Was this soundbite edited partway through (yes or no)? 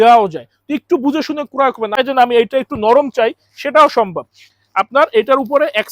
yes